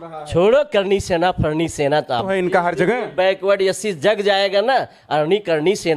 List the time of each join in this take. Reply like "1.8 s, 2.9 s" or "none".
2.3 s